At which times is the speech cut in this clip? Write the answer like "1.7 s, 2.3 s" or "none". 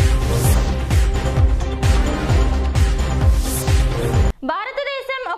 4.3 s